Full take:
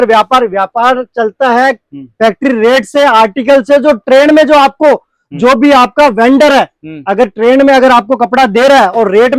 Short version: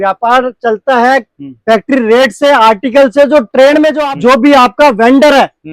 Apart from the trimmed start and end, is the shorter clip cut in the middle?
yes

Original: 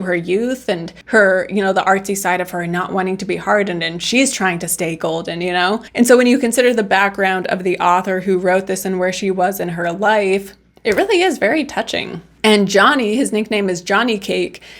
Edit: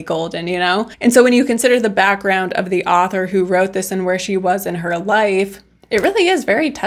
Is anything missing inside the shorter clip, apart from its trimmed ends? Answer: no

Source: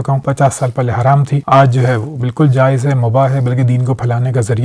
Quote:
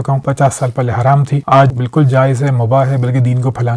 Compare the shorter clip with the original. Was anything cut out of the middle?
yes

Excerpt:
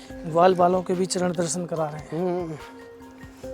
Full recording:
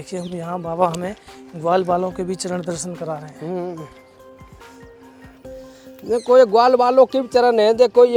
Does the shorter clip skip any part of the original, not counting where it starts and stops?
yes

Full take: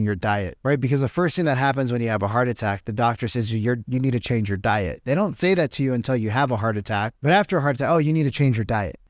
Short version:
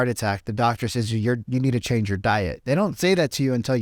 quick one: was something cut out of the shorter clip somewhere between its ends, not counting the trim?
no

